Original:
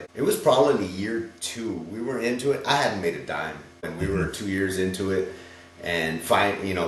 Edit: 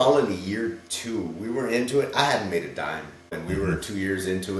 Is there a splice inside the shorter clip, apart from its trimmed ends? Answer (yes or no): no